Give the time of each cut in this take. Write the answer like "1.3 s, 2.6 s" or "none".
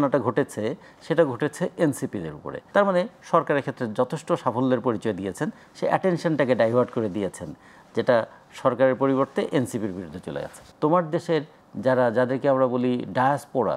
10.6 s

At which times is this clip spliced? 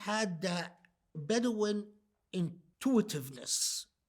1.2 s, 2.6 s

